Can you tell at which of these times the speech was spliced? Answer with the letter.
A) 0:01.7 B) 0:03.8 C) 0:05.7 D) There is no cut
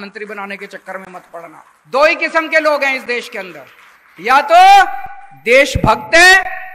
A